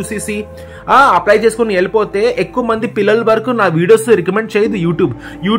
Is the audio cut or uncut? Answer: uncut